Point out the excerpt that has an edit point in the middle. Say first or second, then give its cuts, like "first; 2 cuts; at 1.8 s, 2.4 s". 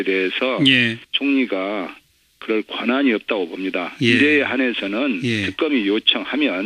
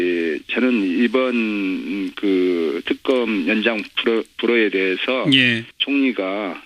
second; 1 cut; at 1.2 s